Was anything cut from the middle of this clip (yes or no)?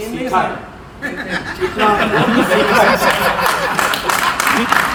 no